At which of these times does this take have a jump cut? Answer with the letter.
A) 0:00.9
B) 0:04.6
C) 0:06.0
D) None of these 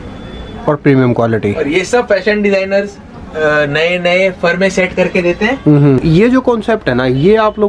C